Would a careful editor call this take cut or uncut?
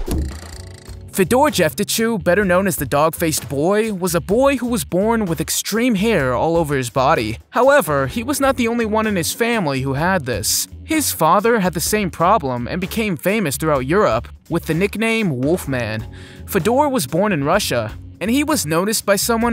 cut